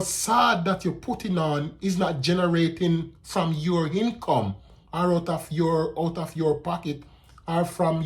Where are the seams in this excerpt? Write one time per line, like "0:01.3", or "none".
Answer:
none